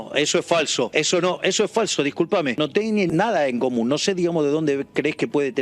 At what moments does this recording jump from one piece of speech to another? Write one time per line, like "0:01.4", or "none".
0:00.9
0:02.9